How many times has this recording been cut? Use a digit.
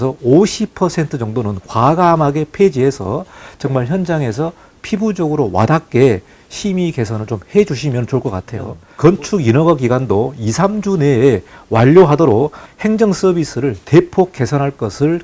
1